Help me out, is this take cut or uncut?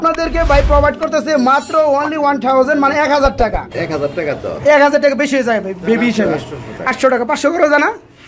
cut